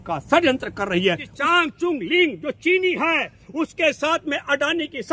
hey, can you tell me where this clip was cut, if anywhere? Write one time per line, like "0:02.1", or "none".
0:01.3